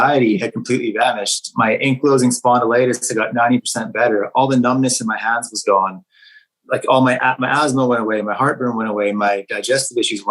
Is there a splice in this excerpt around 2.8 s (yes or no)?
no